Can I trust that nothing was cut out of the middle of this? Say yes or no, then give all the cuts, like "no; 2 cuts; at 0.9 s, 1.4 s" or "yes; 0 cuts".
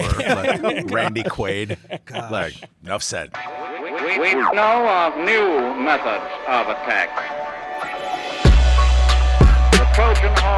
no; 1 cut; at 3.4 s